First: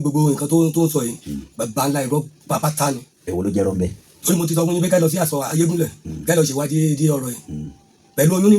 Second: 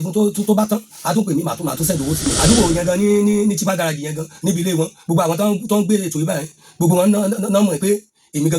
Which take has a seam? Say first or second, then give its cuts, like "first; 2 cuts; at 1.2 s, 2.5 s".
second; 1 cut; at 2.3 s